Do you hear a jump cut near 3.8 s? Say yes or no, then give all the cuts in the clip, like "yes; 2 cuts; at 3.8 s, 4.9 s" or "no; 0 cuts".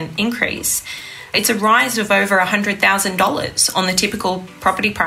no; 1 cut; at 1.3 s